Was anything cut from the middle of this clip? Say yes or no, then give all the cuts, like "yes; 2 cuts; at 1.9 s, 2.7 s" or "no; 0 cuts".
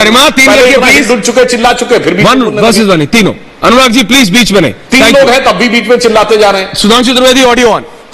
no; 0 cuts